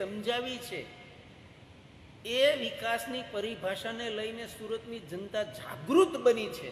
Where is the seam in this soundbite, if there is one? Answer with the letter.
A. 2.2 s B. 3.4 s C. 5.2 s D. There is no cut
D